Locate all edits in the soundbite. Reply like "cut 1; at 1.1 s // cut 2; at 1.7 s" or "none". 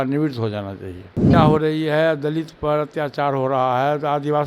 cut 1; at 1.3 s